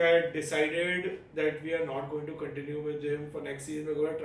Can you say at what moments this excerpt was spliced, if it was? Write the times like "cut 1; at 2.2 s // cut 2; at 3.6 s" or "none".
none